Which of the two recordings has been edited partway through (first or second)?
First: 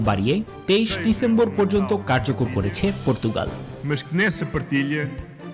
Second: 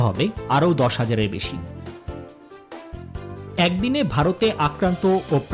second